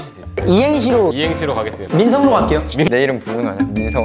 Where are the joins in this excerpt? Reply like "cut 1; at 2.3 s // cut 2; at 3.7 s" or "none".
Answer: cut 1; at 2.9 s